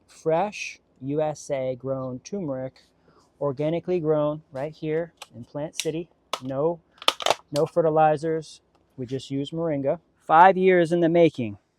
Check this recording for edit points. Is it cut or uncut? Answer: cut